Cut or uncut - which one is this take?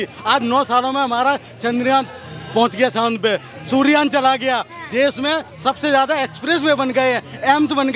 uncut